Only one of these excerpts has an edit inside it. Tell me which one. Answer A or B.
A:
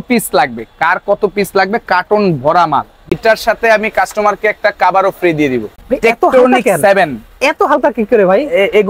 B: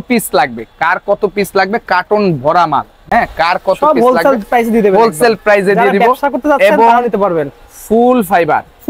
A